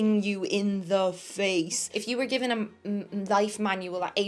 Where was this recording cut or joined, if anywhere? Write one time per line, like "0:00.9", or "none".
0:01.9